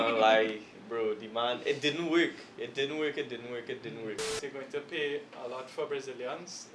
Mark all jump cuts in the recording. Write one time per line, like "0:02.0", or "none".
0:04.3